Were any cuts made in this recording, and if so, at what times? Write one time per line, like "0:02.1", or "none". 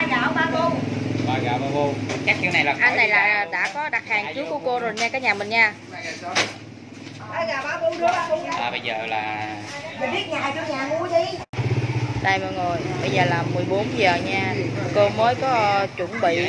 0:11.5